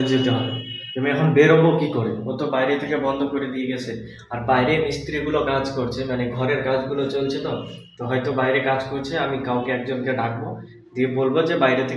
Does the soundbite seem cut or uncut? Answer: uncut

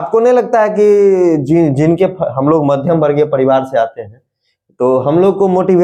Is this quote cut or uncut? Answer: uncut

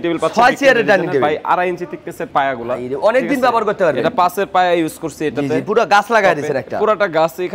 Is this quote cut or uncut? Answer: uncut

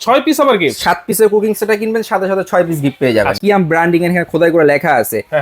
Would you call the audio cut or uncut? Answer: cut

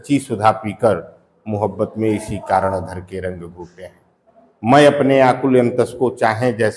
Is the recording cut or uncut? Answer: uncut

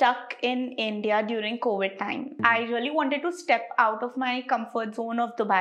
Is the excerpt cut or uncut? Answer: cut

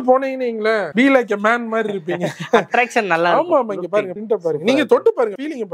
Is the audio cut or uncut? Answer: uncut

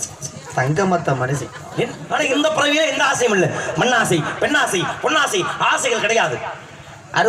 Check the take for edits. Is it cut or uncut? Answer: cut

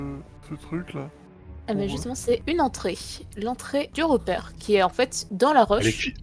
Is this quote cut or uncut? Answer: cut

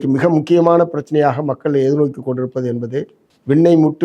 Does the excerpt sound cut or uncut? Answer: uncut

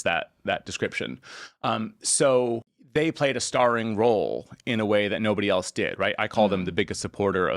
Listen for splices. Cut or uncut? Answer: cut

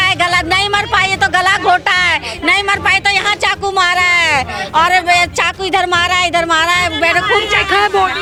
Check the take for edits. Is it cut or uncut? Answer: uncut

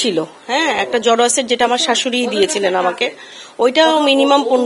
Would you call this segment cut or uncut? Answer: uncut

